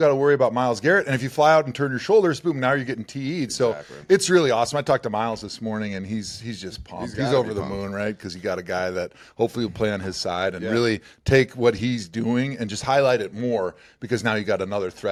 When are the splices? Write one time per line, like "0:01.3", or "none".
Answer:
none